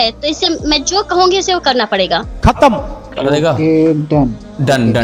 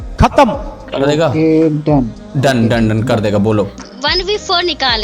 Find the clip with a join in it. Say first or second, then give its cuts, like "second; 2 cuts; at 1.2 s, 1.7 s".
second; 1 cut; at 3.8 s